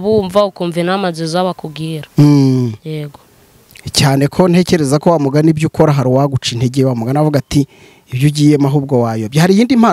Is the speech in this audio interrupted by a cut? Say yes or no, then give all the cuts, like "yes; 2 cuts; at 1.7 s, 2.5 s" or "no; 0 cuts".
no; 0 cuts